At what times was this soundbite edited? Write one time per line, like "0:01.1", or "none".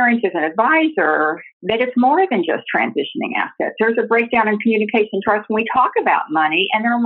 0:01.5